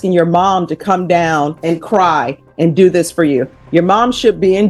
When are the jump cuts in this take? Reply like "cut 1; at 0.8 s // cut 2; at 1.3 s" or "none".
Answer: cut 1; at 1.6 s

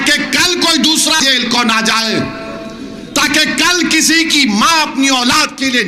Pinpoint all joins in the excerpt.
cut 1; at 1.2 s

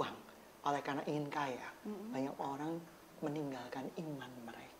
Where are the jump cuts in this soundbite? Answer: none

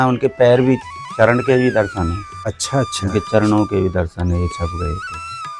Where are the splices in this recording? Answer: none

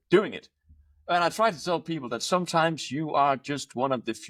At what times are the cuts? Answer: none

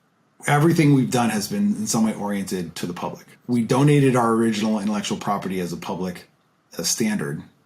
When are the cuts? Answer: cut 1; at 3.4 s

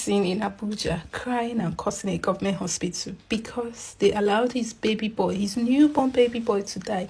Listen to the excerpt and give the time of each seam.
none

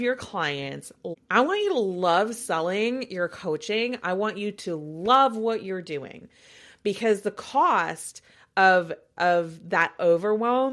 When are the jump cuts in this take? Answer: cut 1; at 1.0 s

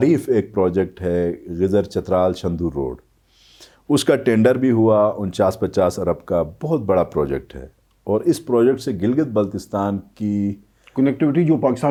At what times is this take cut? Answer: none

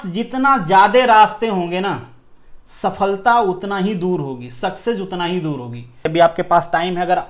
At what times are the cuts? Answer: cut 1; at 6.0 s

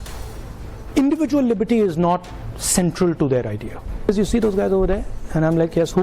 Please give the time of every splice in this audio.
cut 1; at 4.1 s

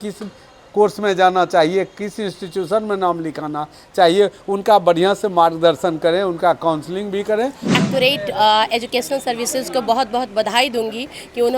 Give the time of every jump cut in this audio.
cut 1; at 7.6 s

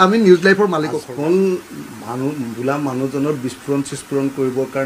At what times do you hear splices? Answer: cut 1; at 1.0 s

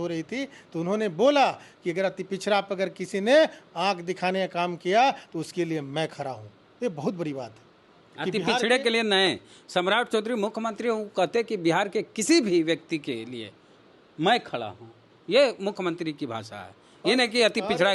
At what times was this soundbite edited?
none

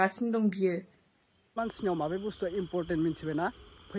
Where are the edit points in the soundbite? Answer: cut 1; at 1.5 s

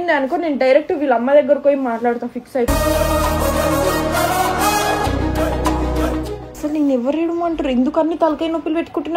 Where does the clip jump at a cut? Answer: cut 1; at 6.4 s

